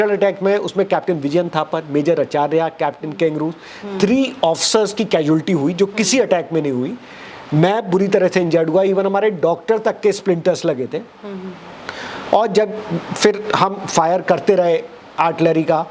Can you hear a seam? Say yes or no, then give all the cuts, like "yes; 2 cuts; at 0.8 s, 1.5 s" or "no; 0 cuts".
no; 0 cuts